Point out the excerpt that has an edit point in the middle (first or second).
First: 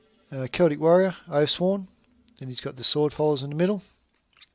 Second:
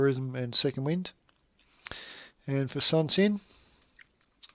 second